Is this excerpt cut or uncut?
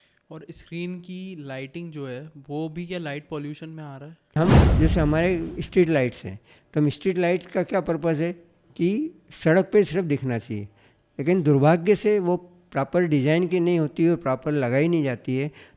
cut